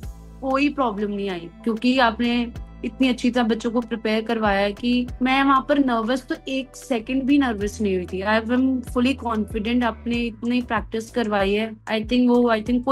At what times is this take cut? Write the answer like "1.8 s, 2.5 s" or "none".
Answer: 5.1 s, 11.8 s